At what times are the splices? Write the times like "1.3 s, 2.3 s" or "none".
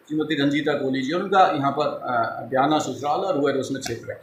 none